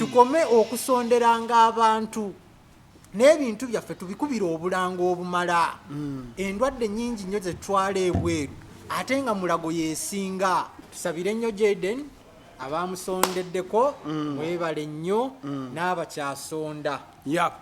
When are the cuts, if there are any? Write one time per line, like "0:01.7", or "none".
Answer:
0:10.8